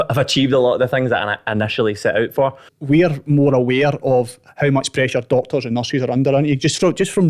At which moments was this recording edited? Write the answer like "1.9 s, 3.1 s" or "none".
2.7 s

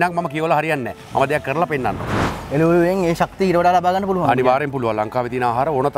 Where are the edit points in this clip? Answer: 2.1 s

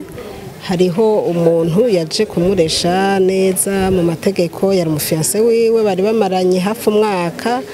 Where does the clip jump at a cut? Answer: none

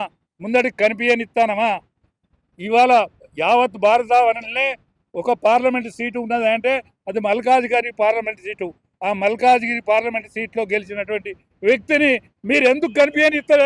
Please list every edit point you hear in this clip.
none

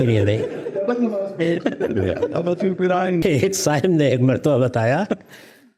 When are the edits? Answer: 3.2 s

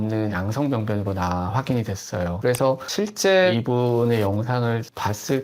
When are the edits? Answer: 2.4 s

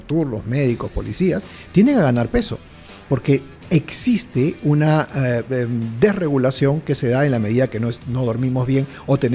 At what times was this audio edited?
none

